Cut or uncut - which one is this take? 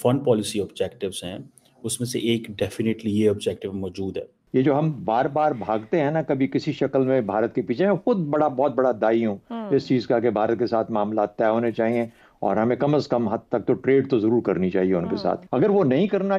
cut